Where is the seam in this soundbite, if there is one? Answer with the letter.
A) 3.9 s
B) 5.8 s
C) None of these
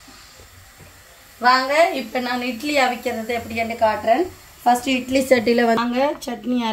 B